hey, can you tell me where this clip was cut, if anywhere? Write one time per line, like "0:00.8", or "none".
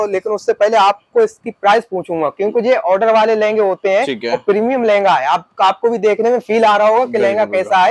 none